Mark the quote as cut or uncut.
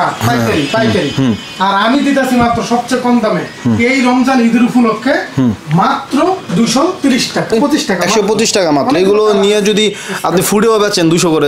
cut